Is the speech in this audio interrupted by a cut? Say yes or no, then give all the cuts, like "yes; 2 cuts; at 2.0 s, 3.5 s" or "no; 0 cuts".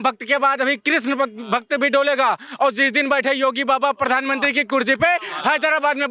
no; 0 cuts